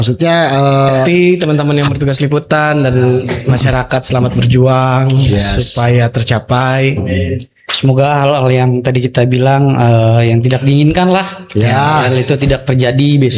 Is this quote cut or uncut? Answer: cut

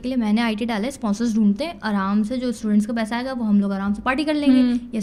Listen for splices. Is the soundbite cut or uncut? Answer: uncut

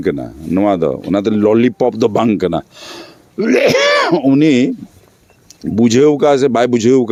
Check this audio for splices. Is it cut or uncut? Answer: uncut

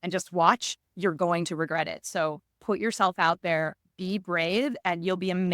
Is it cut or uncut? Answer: uncut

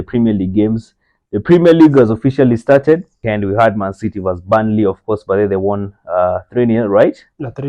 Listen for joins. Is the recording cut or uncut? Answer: cut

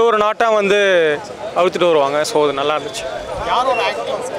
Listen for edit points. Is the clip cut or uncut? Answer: uncut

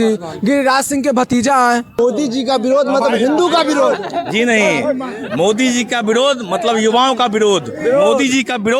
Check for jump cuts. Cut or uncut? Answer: cut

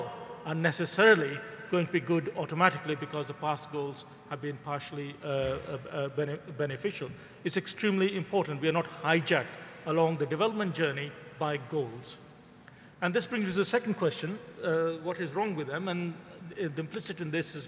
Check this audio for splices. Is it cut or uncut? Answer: cut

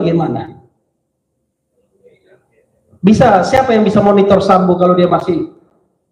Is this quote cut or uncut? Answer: uncut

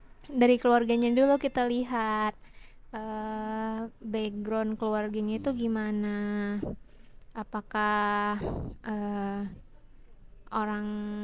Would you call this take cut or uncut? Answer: uncut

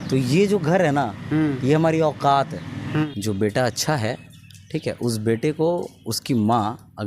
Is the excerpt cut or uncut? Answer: cut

